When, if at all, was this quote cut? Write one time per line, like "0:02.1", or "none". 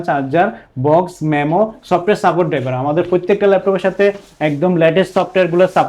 none